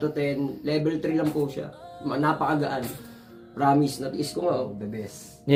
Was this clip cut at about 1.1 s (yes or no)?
no